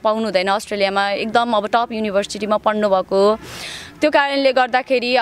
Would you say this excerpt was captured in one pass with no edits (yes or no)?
yes